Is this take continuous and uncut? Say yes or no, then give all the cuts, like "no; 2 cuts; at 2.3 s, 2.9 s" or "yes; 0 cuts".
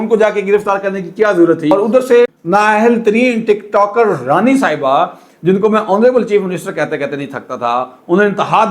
no; 1 cut; at 1.7 s